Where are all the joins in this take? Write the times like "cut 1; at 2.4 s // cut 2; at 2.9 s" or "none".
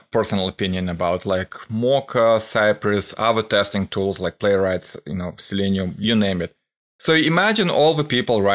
none